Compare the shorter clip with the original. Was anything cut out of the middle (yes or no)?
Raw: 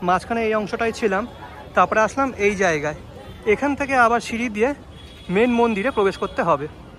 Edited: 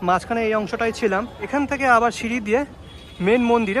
yes